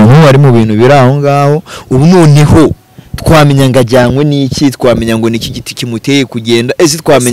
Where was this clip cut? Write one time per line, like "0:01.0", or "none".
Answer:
none